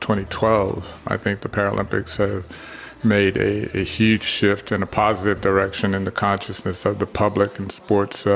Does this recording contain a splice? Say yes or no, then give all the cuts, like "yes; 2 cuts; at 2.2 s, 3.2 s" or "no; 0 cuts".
yes; 1 cut; at 1.0 s